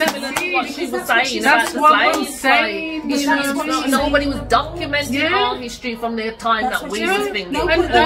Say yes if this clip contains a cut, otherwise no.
no